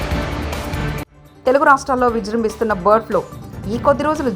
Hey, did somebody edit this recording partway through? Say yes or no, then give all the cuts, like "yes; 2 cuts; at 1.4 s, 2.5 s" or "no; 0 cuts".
yes; 1 cut; at 1.1 s